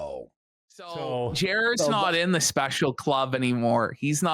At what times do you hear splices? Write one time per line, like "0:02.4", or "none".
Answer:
0:00.9